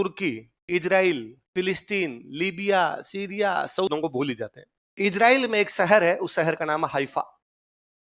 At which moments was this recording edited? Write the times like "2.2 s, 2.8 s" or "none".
3.9 s